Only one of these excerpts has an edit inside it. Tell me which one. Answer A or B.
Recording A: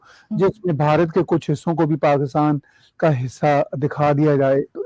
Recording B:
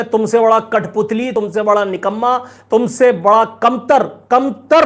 B